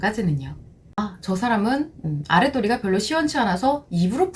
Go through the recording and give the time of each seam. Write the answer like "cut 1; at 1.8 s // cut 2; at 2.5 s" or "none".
cut 1; at 1.0 s

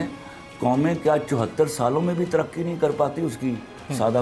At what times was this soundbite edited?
none

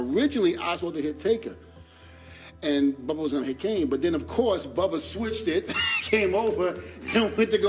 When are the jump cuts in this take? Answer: none

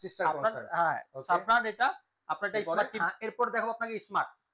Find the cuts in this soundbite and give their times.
cut 1; at 2.9 s

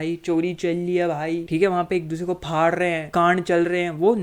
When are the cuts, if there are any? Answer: cut 1; at 1.4 s // cut 2; at 3.1 s

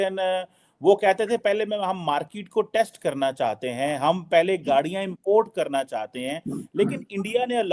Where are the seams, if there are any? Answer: none

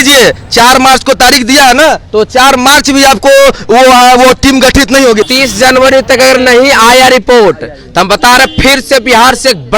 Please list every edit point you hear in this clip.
cut 1; at 5.3 s

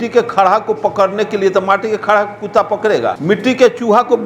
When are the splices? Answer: cut 1; at 3.2 s

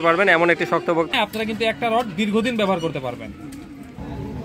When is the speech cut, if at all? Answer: cut 1; at 1.1 s

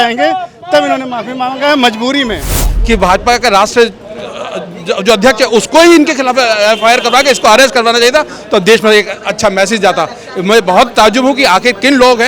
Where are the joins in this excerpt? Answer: cut 1; at 2.7 s

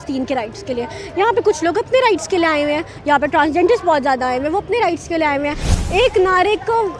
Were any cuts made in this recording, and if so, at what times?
cut 1; at 5.7 s

